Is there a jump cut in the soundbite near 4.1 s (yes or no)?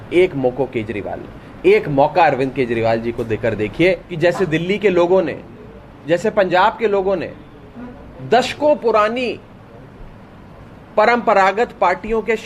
yes